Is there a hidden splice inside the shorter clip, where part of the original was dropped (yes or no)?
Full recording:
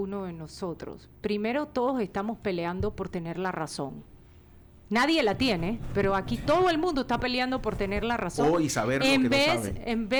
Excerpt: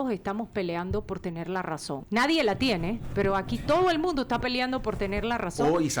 yes